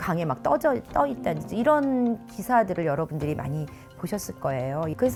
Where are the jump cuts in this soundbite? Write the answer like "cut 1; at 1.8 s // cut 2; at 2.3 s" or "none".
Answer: none